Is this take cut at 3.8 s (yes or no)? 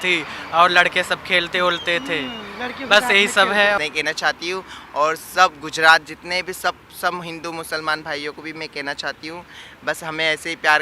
yes